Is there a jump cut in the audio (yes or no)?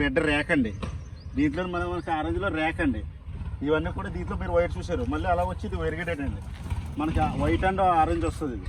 no